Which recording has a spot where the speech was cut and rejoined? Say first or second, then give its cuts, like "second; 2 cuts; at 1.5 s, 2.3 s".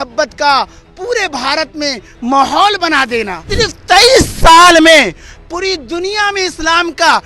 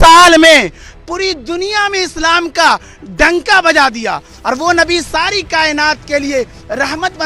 first; 1 cut; at 3.5 s